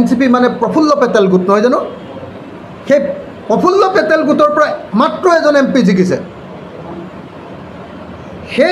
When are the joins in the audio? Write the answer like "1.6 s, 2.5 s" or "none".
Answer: none